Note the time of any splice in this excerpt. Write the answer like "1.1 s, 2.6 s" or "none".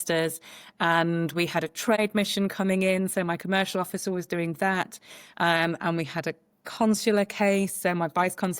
2.0 s

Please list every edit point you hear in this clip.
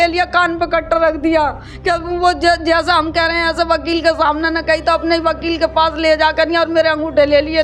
none

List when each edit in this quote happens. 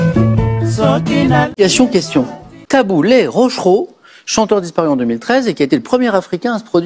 1.5 s

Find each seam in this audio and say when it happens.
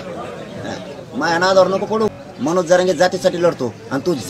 2.2 s

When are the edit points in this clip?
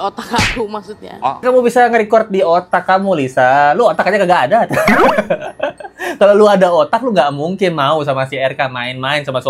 1.4 s

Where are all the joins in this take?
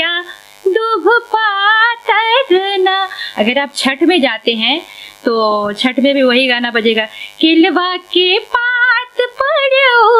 none

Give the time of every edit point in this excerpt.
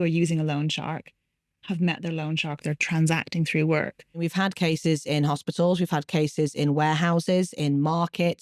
4.3 s

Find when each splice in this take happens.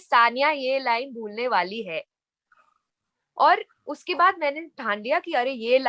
none

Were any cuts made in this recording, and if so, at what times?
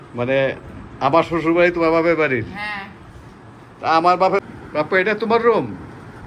4.4 s

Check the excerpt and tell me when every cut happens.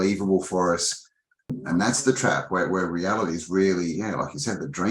1.5 s

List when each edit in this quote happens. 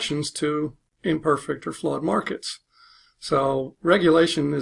3.7 s

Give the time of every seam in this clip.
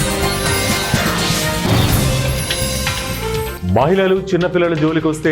3.5 s

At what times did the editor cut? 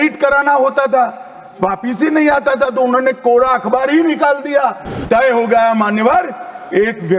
5.0 s

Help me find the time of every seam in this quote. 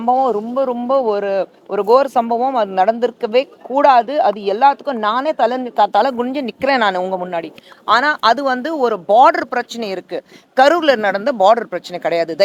none

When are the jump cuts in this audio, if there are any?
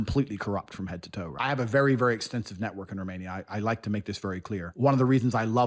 1.3 s, 4.7 s

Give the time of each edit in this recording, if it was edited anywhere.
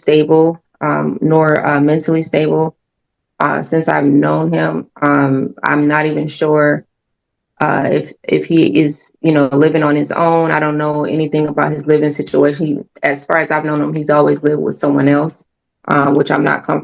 none

